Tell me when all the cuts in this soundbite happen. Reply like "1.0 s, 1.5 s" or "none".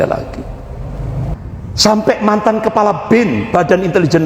1.3 s